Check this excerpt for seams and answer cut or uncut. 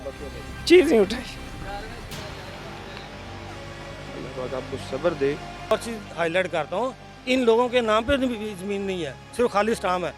cut